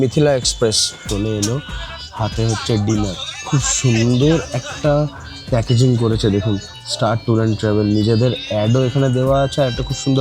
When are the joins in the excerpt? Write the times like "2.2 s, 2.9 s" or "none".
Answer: 1.0 s